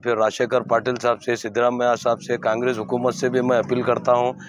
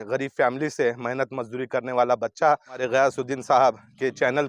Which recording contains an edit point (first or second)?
second